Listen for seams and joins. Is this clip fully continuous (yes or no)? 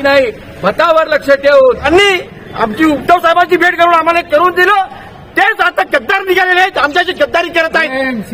no